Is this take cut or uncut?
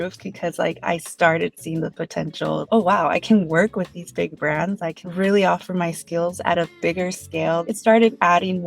cut